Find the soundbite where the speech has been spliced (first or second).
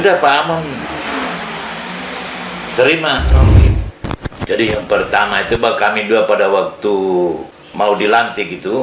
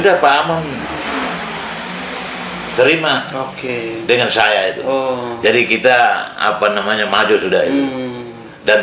first